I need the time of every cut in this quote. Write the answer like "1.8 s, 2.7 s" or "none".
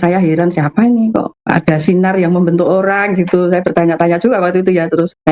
none

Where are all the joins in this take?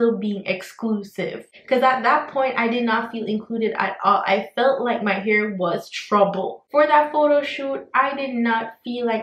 6.6 s

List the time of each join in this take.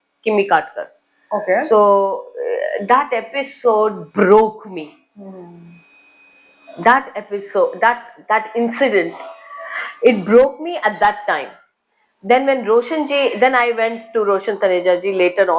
none

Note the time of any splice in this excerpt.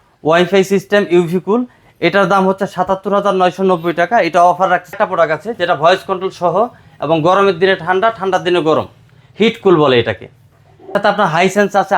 4.9 s, 11.0 s

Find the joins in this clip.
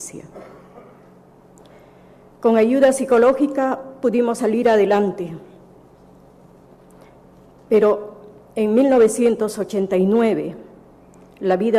none

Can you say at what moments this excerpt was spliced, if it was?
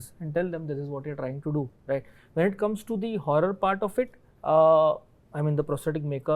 none

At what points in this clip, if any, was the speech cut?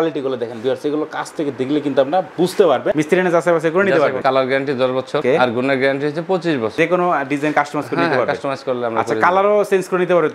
2.9 s, 4.2 s, 6.7 s

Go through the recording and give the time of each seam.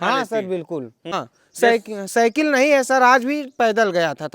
1.3 s

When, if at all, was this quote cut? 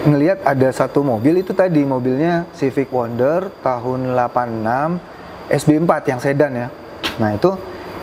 none

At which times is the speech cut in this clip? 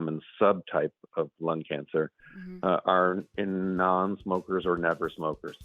none

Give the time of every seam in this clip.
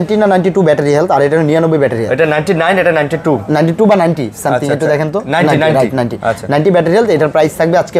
none

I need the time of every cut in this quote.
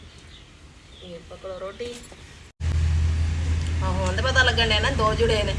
2.6 s

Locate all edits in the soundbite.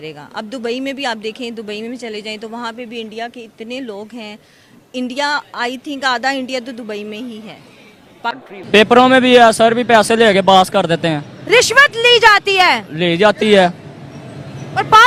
none

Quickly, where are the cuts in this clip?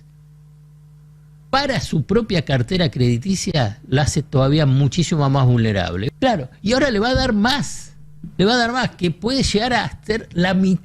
6.0 s

